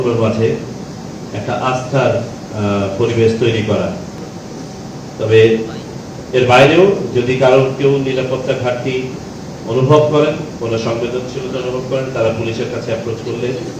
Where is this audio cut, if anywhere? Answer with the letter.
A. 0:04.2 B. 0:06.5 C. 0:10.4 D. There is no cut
A